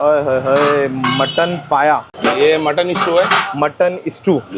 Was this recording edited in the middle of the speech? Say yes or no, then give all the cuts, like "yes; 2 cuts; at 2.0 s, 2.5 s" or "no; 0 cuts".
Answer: yes; 1 cut; at 2.1 s